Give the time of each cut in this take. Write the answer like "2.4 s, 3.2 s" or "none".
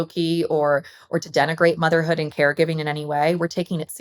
none